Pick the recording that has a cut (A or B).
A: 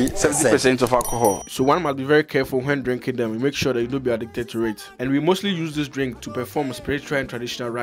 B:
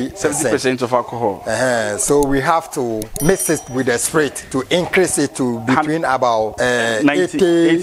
B